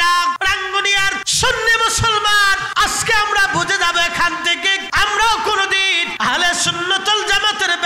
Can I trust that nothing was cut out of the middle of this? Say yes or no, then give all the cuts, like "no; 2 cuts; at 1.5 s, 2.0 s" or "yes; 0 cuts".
no; 4 cuts; at 0.9 s, 2.6 s, 4.8 s, 6.1 s